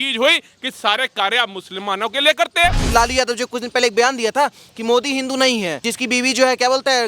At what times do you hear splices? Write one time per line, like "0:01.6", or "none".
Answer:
0:02.8
0:05.9